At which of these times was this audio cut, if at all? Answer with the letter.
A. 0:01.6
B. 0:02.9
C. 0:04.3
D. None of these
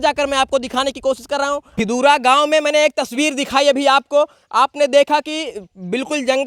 D